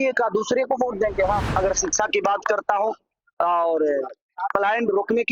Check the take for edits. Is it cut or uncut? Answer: cut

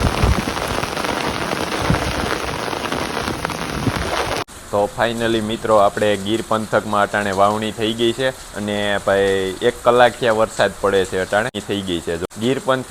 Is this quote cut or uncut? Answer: cut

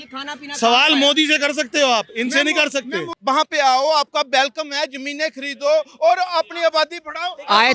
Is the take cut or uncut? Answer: cut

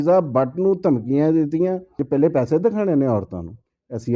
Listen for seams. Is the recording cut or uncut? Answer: cut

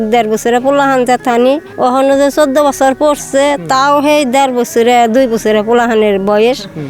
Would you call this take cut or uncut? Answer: cut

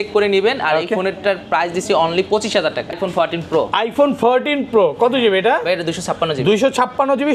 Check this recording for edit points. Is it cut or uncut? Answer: cut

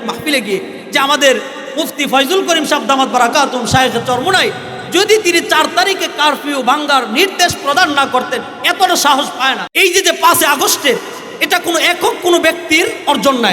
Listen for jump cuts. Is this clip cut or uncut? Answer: cut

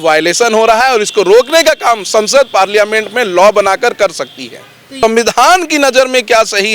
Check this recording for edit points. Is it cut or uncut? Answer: cut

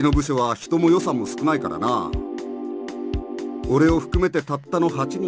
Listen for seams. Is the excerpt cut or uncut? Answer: cut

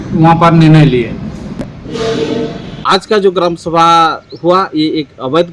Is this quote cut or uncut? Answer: cut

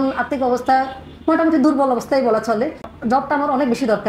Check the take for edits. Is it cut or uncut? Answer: uncut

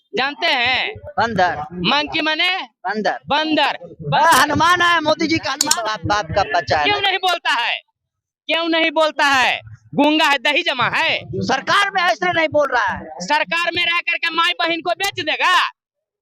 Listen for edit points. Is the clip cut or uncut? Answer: cut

